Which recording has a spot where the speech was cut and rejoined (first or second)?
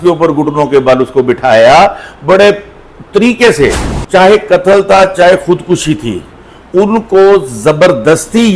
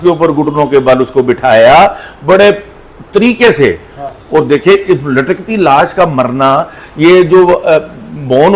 first